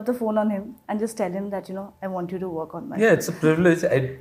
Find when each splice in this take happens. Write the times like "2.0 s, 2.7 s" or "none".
none